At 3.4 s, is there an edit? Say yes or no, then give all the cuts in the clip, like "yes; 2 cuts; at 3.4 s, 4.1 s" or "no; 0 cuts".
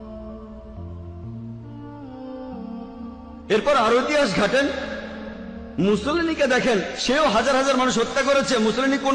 yes; 1 cut; at 3.4 s